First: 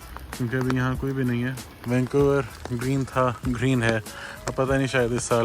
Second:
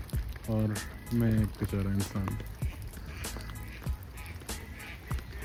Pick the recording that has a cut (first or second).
first